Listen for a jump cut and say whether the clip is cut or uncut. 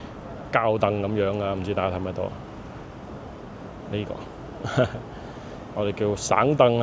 uncut